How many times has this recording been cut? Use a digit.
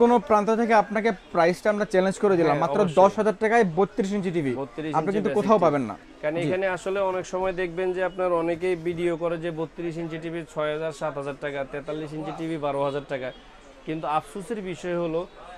0